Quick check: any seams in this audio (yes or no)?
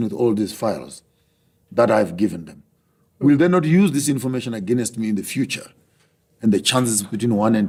no